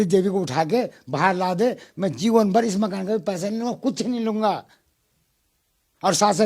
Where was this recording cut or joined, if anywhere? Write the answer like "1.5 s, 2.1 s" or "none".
none

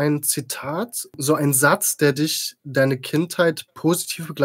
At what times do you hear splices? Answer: 1.2 s

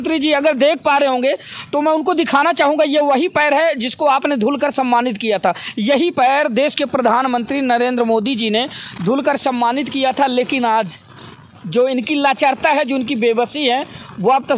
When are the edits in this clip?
none

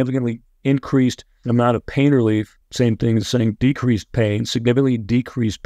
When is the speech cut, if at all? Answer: 1.3 s, 2.6 s

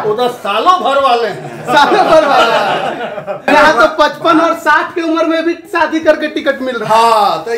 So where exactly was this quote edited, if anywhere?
3.4 s

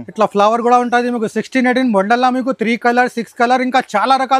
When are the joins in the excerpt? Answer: none

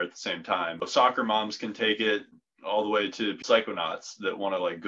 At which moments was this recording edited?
0.9 s, 2.3 s, 3.4 s

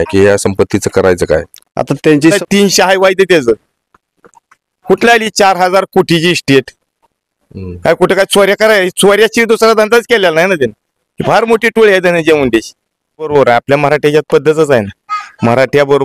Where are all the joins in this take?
2.4 s, 13.3 s

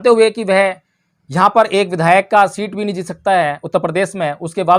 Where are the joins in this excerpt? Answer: none

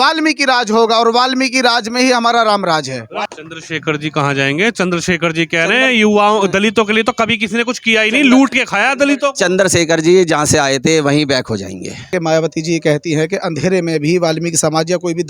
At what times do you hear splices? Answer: 3.3 s, 12.1 s

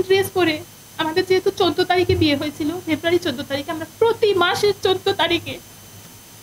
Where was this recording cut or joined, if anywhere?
none

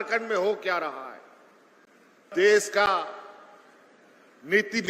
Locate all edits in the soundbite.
2.3 s

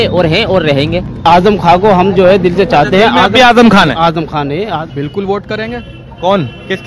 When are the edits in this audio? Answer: 1.2 s, 5.0 s

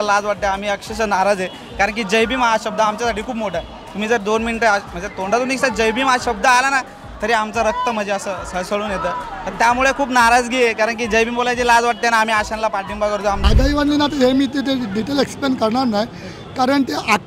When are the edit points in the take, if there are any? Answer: 13.4 s

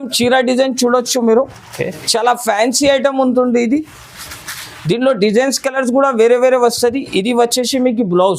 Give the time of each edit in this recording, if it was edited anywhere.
none

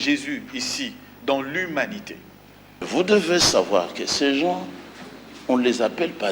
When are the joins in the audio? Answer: 2.7 s

